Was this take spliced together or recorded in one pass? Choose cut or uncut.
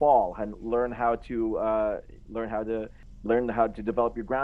uncut